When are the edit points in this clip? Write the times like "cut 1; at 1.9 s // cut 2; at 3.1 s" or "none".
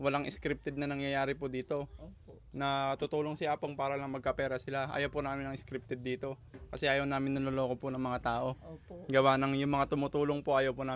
none